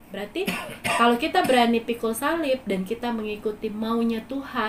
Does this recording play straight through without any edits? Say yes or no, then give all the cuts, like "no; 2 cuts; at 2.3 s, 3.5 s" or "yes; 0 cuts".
yes; 0 cuts